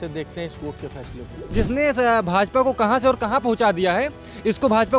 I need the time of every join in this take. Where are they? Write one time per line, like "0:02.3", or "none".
0:01.5